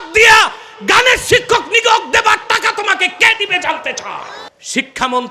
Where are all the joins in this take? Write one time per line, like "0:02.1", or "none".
0:04.4